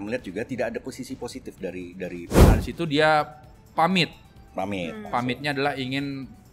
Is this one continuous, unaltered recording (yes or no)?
no